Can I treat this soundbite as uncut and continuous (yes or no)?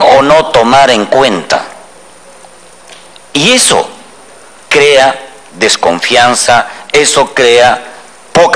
yes